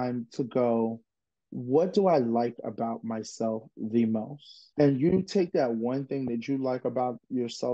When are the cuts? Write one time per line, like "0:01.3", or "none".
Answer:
none